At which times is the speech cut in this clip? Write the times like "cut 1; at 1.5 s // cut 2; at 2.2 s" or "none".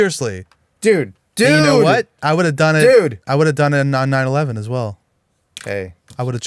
cut 1; at 1.2 s